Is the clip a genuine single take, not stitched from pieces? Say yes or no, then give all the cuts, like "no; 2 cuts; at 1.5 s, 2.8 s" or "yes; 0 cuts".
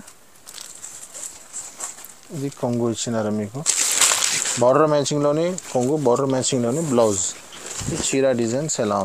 yes; 0 cuts